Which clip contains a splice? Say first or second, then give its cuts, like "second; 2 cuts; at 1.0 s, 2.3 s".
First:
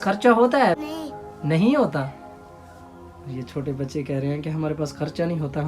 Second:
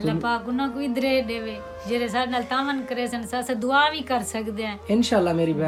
first; 1 cut; at 0.9 s